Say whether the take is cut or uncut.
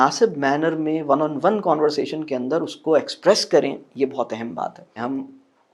cut